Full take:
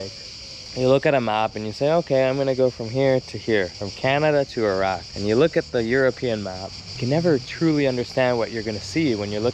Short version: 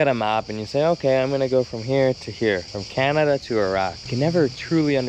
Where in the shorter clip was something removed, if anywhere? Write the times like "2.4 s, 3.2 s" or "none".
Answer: 4.0 s